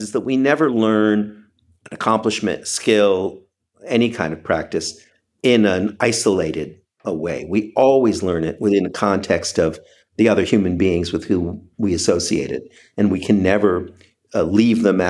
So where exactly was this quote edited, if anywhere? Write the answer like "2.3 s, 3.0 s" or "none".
none